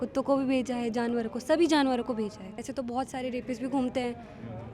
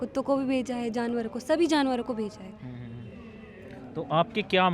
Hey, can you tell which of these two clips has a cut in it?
first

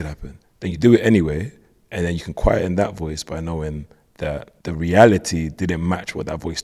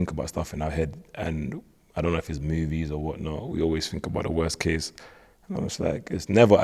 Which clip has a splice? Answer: first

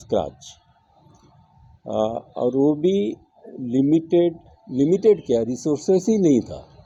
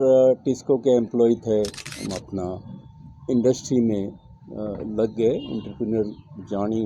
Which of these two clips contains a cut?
second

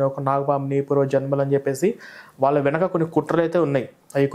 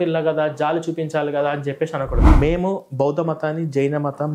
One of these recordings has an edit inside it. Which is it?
second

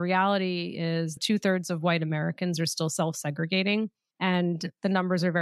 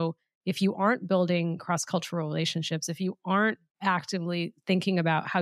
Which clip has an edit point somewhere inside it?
first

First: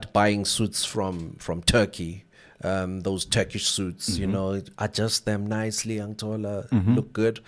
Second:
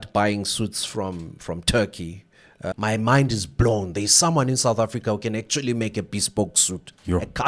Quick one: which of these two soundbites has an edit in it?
second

